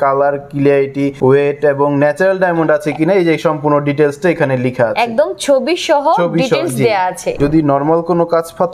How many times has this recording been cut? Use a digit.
2